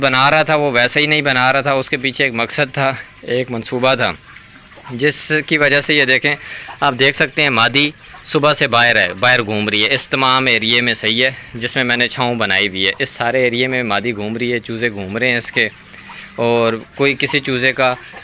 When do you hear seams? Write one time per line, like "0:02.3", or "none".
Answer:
none

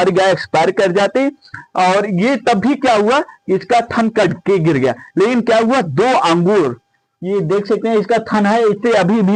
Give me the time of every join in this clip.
none

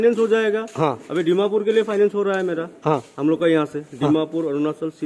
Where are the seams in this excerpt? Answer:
none

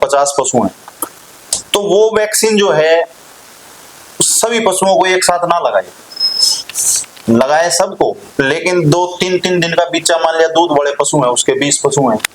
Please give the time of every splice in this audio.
none

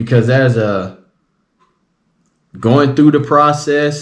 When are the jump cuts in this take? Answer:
none

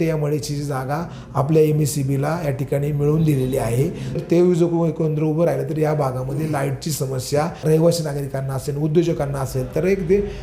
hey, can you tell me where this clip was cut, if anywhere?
0:04.2
0:07.6

